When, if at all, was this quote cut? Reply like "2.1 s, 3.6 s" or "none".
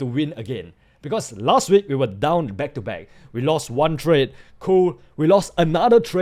none